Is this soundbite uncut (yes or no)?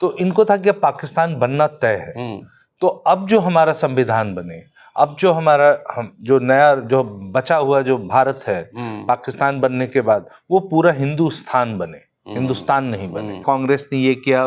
no